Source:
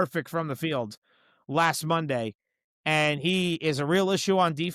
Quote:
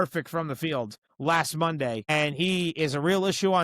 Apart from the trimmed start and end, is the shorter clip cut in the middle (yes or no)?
yes